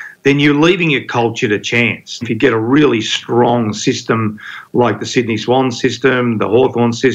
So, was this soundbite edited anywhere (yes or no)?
yes